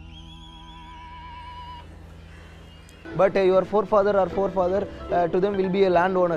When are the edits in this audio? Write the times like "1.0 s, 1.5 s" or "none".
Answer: 3.0 s